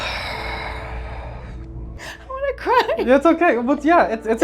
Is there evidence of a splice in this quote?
yes; 1 cut; at 1.9 s

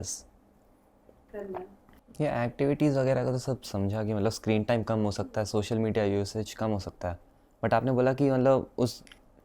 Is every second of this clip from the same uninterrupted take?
no; 1 cut; at 1.9 s

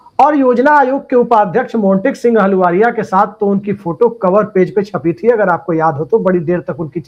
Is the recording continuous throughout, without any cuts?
yes; 0 cuts

